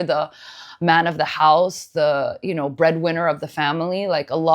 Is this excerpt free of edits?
yes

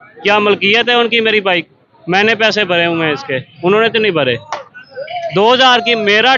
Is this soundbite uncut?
yes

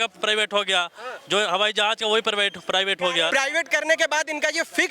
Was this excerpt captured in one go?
no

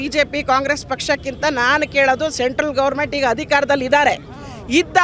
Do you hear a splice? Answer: no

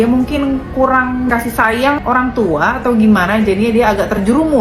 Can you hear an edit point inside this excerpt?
no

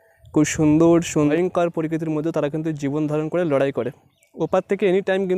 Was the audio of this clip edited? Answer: yes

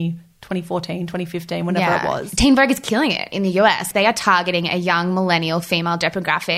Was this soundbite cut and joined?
yes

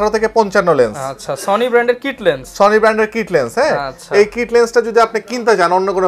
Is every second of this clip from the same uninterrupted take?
yes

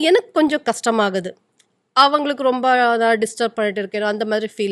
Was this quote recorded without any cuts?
yes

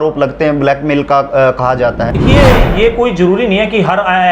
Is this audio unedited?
no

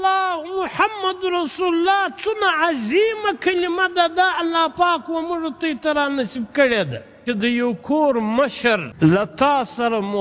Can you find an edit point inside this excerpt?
yes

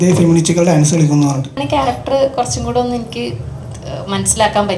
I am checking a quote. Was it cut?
yes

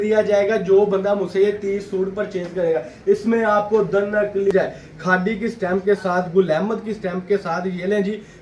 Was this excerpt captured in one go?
no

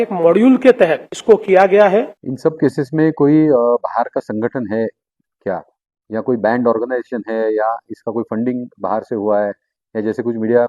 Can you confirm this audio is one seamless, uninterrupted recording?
no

